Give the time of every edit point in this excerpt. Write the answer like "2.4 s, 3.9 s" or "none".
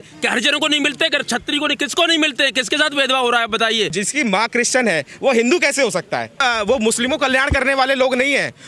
3.9 s, 6.4 s